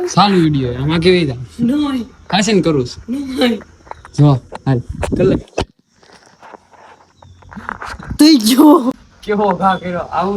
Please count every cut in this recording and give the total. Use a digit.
1